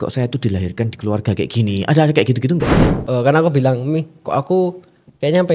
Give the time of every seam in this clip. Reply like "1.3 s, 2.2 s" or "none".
2.9 s